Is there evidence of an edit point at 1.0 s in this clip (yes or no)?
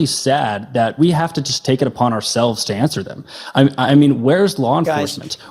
yes